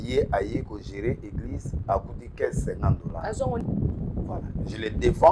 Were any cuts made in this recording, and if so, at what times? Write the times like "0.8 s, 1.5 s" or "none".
3.6 s